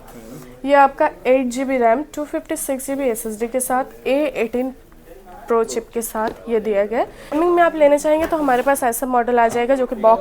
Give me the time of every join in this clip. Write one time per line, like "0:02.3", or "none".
0:07.4